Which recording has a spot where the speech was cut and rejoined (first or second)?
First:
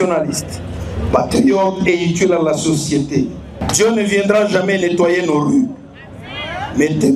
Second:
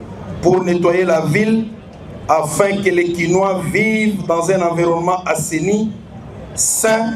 first